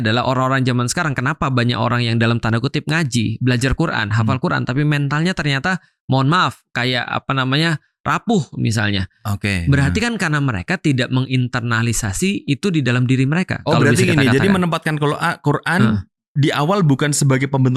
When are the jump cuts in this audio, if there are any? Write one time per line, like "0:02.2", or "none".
none